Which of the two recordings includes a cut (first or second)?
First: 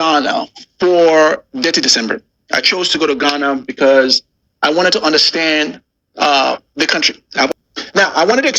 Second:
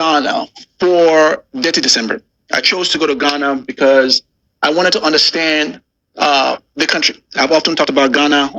first